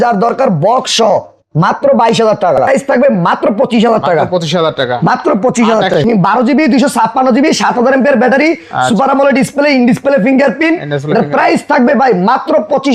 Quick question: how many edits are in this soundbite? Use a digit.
2